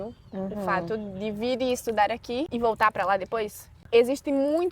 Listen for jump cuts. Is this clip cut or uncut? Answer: cut